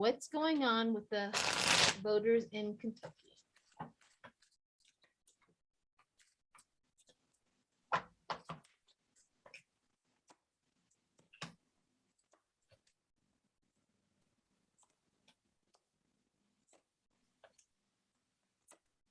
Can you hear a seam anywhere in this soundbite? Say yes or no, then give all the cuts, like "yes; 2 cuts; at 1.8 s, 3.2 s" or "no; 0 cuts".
no; 0 cuts